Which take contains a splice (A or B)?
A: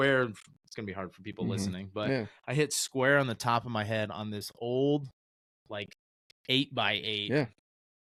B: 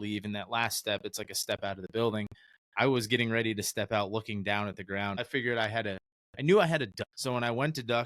B